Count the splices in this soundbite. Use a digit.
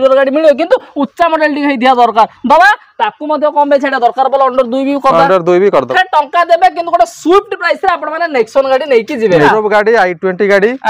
2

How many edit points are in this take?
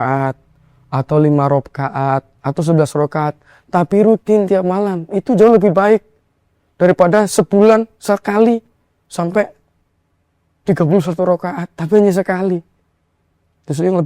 0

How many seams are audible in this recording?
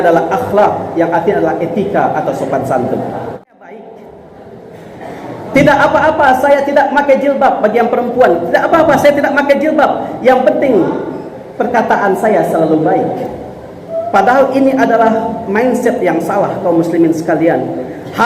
1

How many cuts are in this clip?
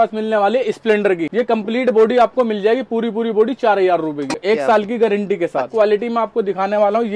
3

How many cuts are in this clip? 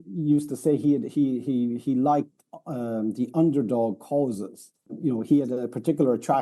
1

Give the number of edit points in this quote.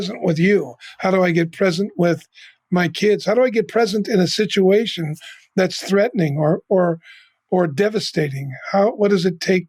0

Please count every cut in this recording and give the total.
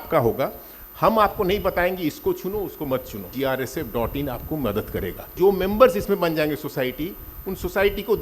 2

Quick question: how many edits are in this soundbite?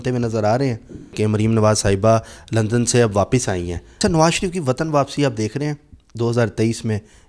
2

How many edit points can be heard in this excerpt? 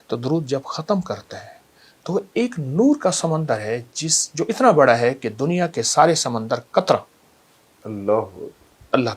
0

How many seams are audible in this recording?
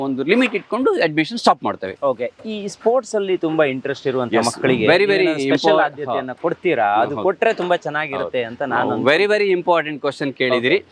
0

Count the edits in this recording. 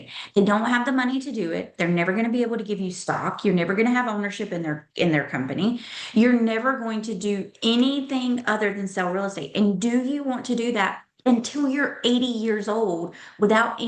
0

